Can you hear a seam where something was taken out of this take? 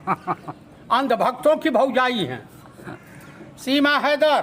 no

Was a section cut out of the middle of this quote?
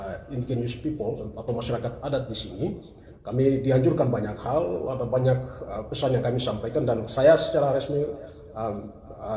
no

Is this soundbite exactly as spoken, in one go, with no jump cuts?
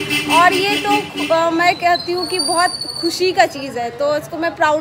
yes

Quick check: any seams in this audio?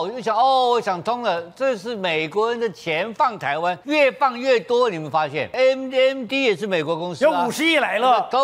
yes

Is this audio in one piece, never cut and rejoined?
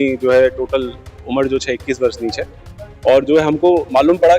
yes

